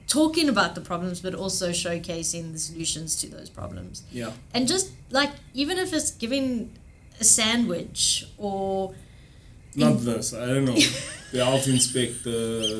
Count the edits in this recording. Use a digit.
0